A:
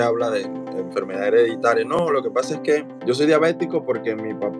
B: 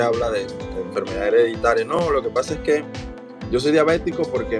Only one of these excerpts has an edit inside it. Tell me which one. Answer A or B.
A